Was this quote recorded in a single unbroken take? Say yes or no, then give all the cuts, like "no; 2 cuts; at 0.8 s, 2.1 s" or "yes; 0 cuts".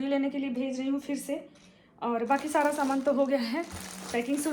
yes; 0 cuts